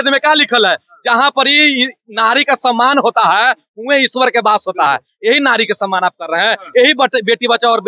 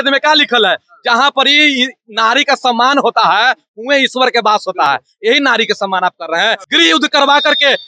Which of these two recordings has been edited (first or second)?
second